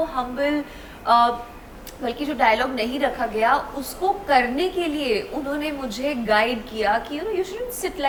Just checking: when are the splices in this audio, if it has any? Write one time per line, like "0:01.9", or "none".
none

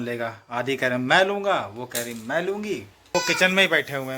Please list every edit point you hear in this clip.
0:03.1

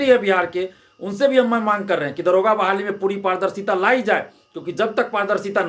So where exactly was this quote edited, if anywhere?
none

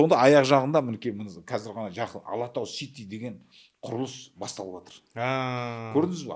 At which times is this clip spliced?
none

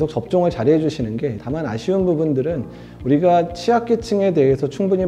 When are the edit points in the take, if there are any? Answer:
0:01.4

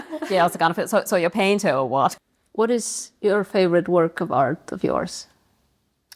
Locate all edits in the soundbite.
0:02.2

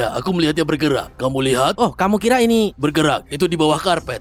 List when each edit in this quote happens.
none

